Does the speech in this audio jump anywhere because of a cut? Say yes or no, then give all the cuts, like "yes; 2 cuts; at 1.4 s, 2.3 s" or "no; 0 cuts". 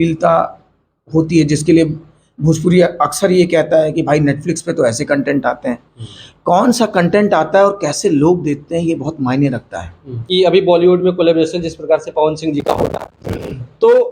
yes; 1 cut; at 10.2 s